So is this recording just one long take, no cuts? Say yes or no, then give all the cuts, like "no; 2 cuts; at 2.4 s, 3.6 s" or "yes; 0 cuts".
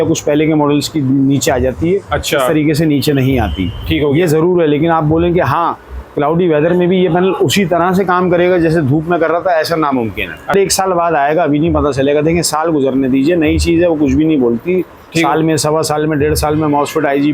no; 1 cut; at 10.5 s